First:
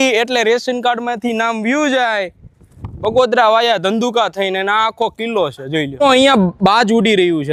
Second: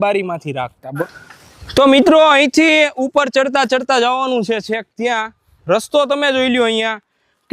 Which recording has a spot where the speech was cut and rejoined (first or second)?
second